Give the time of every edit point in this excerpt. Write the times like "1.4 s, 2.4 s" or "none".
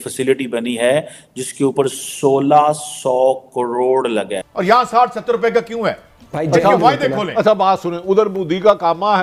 4.5 s